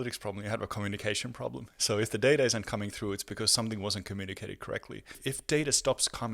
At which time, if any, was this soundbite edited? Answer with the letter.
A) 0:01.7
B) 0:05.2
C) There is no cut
B